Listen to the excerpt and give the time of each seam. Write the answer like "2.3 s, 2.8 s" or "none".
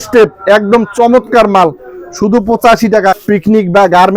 3.2 s